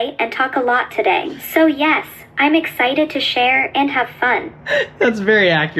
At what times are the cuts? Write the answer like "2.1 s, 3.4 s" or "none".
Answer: 1.4 s, 4.5 s

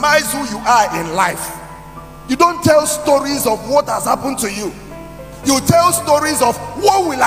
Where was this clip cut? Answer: none

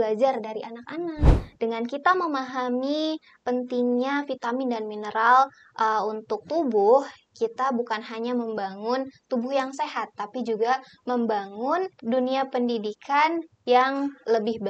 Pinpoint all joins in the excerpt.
1.4 s, 12.0 s

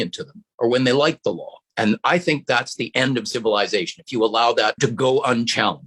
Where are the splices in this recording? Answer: 4.8 s

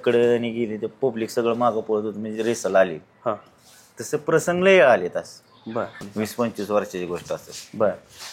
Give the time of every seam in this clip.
6.0 s

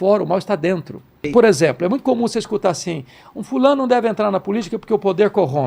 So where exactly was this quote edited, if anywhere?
1.3 s

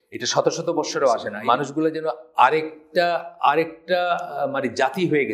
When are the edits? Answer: 1.3 s

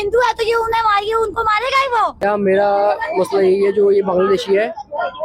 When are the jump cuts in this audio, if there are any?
2.2 s

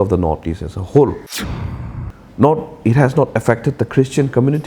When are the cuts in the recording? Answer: 1.6 s

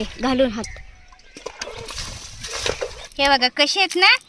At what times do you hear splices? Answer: 3.0 s

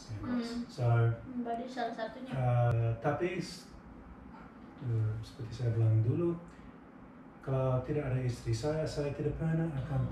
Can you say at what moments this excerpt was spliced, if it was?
2.7 s

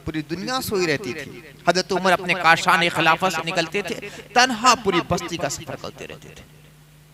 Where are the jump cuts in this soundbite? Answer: none

